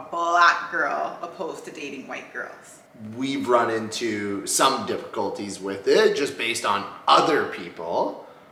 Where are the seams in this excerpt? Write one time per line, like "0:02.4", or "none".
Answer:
none